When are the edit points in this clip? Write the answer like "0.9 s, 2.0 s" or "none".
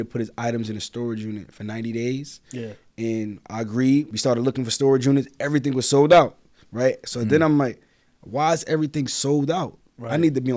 4.1 s